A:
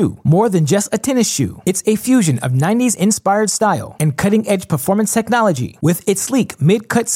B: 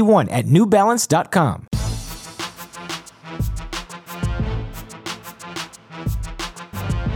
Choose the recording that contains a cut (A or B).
B